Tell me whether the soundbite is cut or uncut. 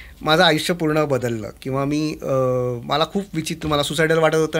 uncut